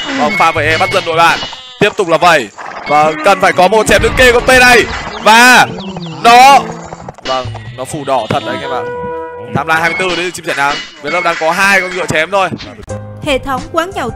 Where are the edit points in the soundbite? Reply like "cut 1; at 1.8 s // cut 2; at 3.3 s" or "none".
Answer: cut 1; at 13.1 s